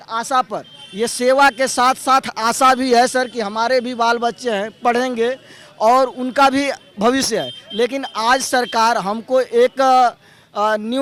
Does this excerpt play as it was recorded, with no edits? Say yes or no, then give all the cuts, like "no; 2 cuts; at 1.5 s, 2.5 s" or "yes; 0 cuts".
yes; 0 cuts